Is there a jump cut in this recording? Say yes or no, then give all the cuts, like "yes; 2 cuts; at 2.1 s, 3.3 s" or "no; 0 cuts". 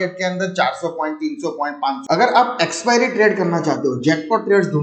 yes; 1 cut; at 2.0 s